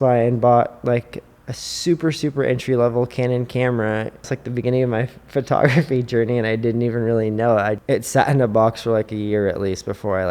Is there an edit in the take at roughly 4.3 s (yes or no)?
yes